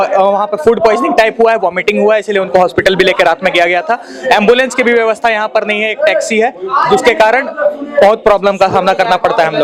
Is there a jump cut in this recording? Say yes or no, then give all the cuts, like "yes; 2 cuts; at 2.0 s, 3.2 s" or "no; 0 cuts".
no; 0 cuts